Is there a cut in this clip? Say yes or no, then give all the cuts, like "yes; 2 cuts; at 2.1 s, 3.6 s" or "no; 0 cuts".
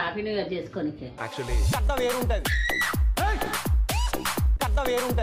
no; 0 cuts